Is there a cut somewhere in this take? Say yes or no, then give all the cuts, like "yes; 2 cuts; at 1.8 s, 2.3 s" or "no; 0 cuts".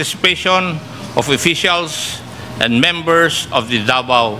no; 0 cuts